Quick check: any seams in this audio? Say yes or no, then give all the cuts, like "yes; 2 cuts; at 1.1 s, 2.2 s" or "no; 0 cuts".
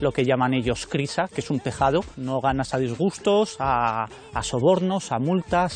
yes; 1 cut; at 2.2 s